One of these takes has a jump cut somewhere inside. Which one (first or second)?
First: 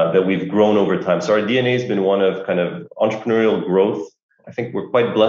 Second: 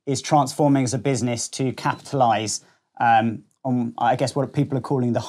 first